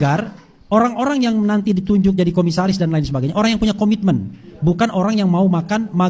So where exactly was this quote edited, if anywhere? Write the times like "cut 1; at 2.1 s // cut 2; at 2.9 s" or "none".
none